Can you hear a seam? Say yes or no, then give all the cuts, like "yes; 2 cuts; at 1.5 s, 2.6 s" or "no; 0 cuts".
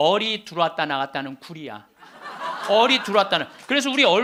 no; 0 cuts